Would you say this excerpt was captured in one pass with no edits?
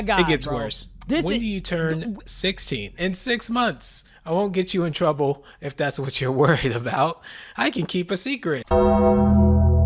no; 2 cuts; at 3.0 s, 8.6 s

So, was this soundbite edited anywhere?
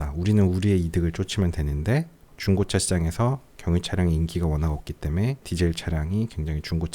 yes; 2 cuts; at 2.3 s, 5.5 s

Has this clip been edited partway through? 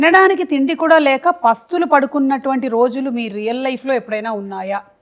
no; 0 cuts

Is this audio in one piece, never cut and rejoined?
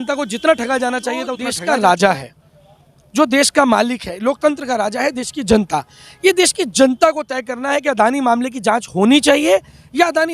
no; 1 cut; at 1.5 s

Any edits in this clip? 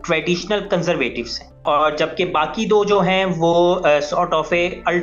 yes; 1 cut; at 1.6 s

